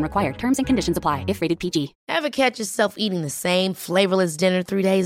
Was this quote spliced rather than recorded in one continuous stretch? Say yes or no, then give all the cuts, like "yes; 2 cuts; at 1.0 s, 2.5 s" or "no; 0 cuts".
yes; 1 cut; at 2.0 s